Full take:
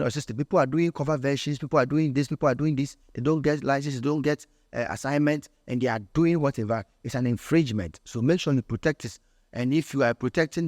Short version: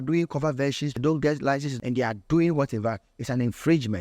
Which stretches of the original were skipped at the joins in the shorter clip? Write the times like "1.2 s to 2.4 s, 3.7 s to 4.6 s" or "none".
1.5 s to 3.1 s, 3.9 s to 5.6 s

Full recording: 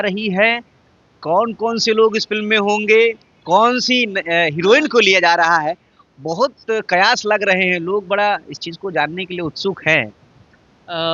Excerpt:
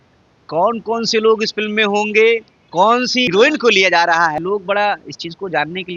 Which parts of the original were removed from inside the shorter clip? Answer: 4.0 s to 4.6 s, 5.7 s to 7.8 s

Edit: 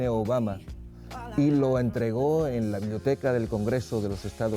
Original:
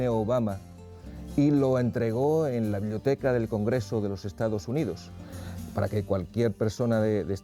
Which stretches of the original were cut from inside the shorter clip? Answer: none

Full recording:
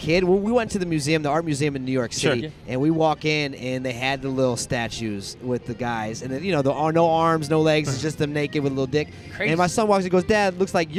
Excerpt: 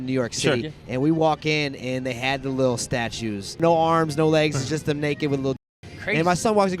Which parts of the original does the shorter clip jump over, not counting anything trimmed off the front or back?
5.4 s to 6.9 s

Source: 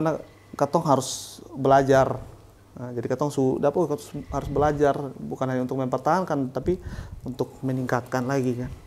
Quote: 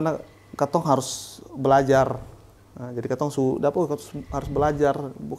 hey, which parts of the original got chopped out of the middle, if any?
none

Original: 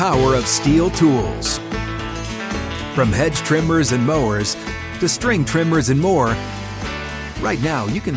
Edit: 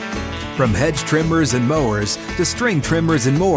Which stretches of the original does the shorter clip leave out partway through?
4.6 s to 4.8 s

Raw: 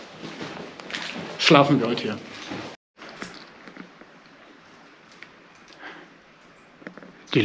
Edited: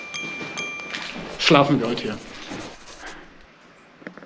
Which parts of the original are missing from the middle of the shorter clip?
2.9 s to 5.7 s

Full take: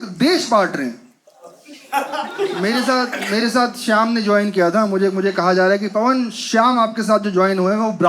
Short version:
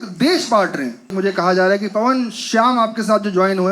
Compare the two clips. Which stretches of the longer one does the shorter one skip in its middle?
1.1 s to 5.1 s

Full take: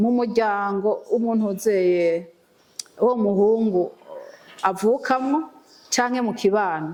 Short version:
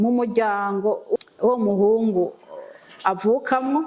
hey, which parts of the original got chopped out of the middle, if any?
1.2 s to 2.8 s

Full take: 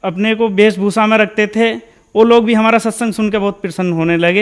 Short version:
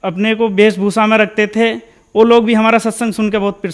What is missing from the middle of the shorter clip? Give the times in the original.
none

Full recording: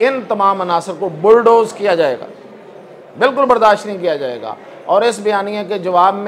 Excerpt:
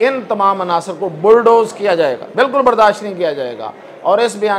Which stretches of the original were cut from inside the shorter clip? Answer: 2.2 s to 3.1 s

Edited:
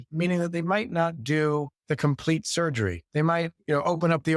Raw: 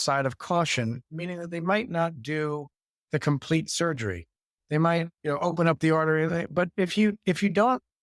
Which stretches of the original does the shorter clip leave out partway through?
2.7 s to 3.0 s, 4.2 s to 4.6 s

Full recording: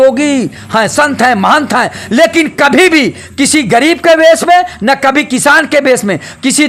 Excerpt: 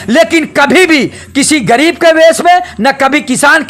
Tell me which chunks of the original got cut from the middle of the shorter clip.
none

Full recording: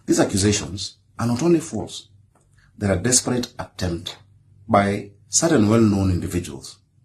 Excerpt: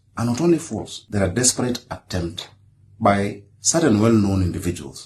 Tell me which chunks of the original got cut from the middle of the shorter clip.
2.0 s to 2.6 s

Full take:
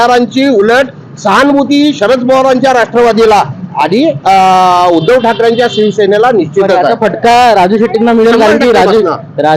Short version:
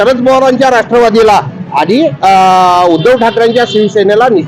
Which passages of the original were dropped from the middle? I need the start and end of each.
none

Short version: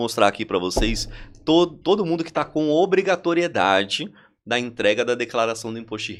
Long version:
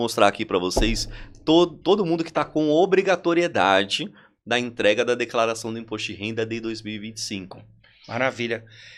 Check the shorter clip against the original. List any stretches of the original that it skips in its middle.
none

